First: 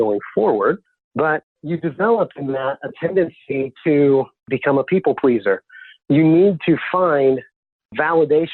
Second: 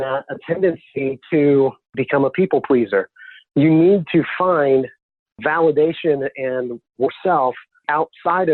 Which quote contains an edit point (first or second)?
first